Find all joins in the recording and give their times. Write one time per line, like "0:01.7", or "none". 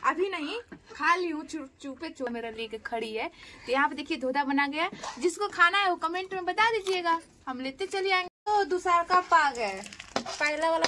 0:02.3
0:08.3

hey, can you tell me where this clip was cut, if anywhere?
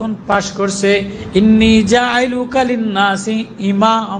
0:01.2

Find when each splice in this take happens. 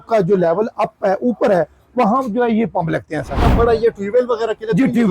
0:03.4

